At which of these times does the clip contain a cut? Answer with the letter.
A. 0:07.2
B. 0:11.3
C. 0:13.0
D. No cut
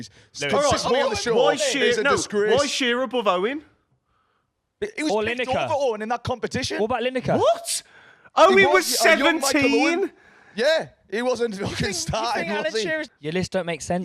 C